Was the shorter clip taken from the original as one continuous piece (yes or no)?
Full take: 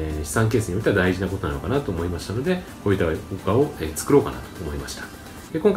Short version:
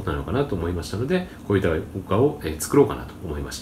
yes